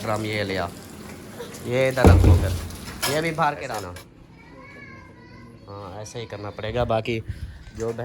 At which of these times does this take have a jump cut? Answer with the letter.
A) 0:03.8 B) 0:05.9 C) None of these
A